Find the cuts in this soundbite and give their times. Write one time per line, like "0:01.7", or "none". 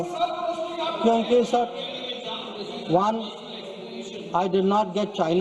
none